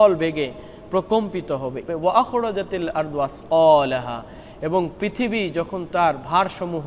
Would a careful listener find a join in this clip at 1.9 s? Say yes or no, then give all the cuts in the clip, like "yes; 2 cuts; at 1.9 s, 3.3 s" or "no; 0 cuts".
yes; 1 cut; at 1.9 s